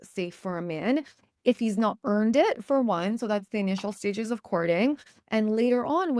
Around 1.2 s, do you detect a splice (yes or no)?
no